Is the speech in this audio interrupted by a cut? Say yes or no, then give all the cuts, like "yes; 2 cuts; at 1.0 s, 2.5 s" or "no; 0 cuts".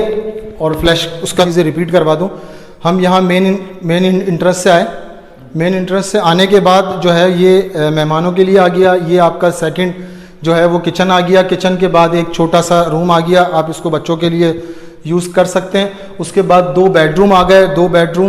yes; 1 cut; at 1.5 s